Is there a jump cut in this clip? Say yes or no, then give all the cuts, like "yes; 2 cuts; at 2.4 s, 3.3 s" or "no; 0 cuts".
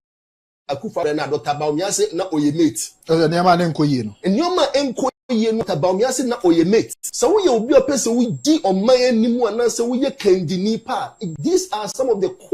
yes; 1 cut; at 7.0 s